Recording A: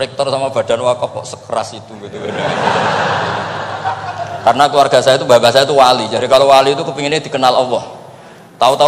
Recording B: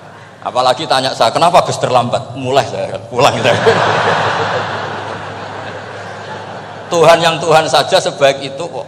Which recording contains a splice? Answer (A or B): A